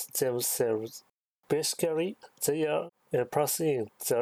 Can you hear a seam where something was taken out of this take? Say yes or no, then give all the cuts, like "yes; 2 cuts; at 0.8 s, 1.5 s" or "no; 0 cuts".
yes; 1 cut; at 1.3 s